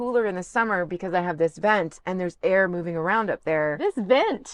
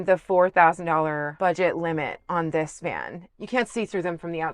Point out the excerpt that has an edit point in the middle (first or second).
second